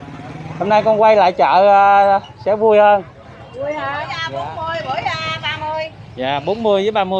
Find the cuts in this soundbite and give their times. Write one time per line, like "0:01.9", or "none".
0:04.2